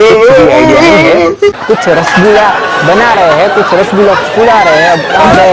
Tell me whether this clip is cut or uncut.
cut